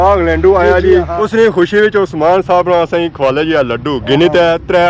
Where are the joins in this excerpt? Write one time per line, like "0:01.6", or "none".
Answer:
0:01.1